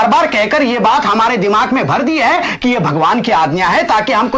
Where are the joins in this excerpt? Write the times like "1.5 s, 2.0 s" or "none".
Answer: none